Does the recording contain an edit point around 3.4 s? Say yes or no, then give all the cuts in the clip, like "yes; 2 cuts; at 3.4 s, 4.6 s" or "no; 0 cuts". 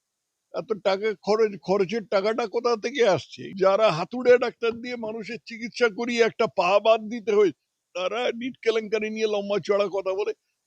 yes; 1 cut; at 3.4 s